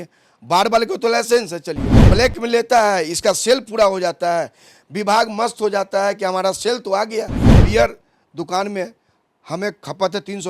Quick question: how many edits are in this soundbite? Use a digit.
2